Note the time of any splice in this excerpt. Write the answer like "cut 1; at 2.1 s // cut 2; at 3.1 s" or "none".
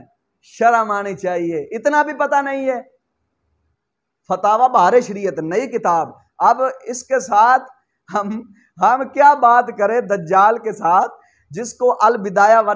cut 1; at 3.3 s